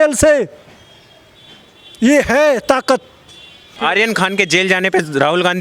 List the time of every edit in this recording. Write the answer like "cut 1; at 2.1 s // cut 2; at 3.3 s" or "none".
cut 1; at 3.8 s